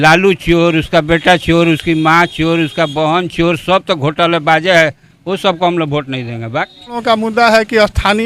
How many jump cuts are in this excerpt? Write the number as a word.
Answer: one